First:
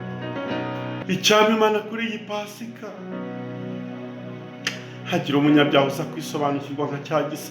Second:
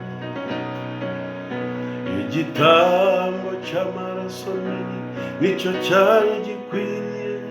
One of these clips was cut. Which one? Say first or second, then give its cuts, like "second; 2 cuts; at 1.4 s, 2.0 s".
first; 1 cut; at 1.1 s